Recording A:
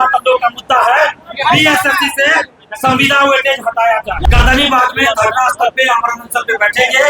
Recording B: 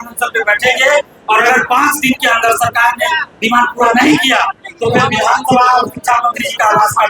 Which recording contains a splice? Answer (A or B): A